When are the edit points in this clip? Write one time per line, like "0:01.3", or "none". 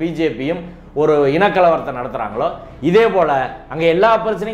none

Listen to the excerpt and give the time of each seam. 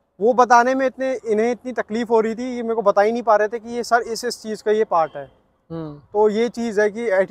none

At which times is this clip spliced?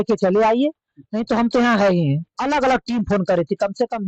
0:02.3

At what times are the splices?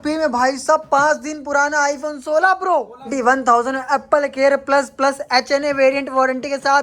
0:03.1

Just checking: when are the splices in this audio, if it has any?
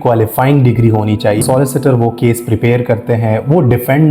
0:01.4

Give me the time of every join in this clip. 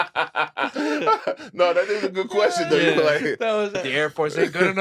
0:03.8

